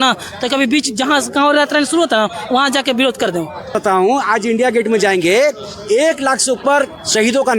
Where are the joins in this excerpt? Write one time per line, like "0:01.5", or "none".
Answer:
0:03.8